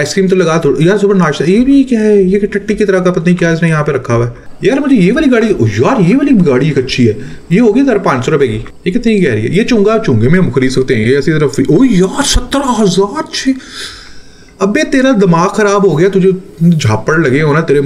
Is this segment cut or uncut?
cut